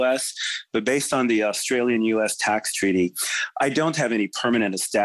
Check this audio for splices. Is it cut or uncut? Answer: uncut